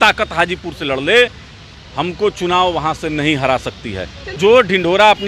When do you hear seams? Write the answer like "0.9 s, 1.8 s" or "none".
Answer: 4.4 s